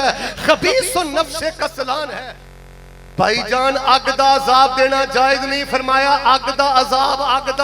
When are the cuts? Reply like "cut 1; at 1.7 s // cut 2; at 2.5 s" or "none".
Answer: cut 1; at 2.2 s